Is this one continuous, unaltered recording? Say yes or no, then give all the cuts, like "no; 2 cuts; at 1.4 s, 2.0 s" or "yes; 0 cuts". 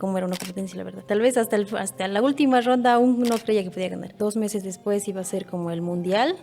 no; 2 cuts; at 1.0 s, 4.2 s